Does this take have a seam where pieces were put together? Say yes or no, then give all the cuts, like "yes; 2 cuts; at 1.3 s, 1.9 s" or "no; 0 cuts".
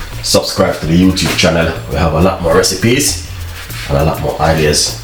no; 0 cuts